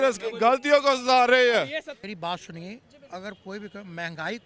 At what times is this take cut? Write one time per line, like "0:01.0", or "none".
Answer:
0:02.0

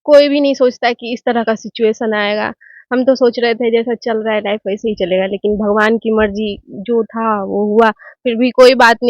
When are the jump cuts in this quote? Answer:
none

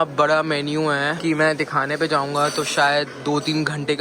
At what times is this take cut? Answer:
0:01.2

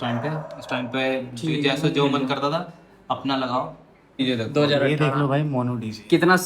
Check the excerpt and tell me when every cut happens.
0:04.2

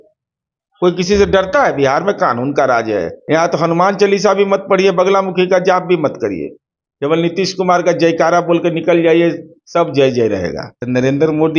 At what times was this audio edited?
0:03.1
0:10.7

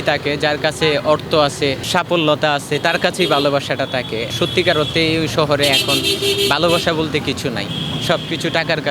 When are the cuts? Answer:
0:07.7

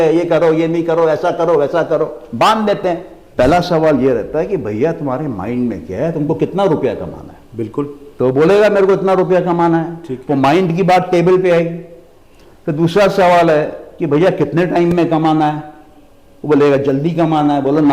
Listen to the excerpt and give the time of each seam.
0:03.2

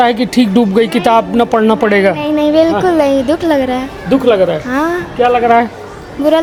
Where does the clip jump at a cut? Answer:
none

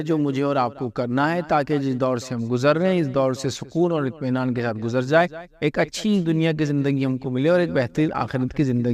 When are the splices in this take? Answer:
none

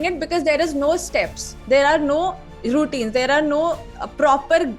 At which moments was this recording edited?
none

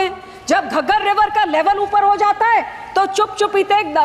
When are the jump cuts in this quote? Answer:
none

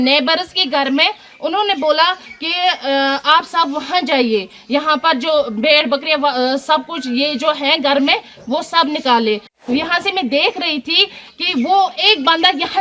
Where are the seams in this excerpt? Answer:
0:09.5

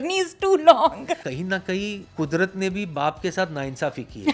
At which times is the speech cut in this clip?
0:01.2
0:02.0

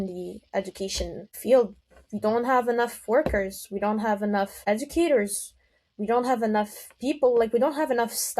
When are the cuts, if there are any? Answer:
0:01.4
0:04.6

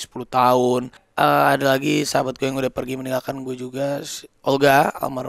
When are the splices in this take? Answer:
0:01.0

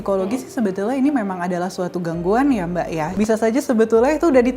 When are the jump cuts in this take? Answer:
0:03.1

